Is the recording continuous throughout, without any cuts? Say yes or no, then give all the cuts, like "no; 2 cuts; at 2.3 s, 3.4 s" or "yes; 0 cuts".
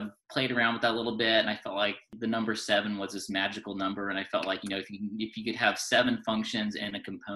no; 1 cut; at 2.1 s